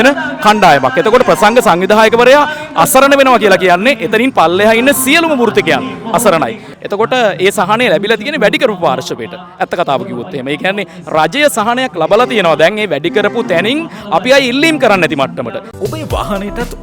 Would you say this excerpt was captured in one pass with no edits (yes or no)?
no